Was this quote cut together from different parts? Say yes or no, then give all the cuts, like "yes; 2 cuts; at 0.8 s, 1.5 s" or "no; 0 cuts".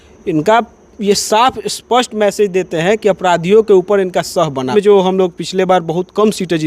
yes; 1 cut; at 4.7 s